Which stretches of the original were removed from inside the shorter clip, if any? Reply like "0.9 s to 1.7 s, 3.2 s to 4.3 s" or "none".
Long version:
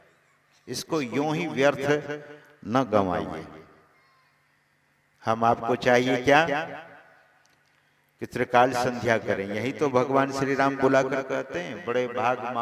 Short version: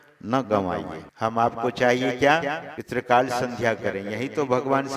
3.4 s to 5.1 s, 6.8 s to 8.2 s